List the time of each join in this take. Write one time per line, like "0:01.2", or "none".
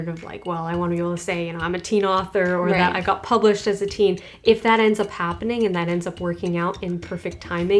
none